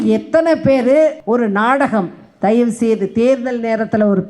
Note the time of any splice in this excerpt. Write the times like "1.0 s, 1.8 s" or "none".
1.2 s